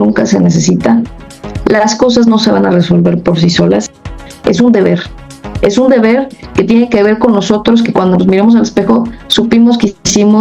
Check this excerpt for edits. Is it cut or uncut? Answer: cut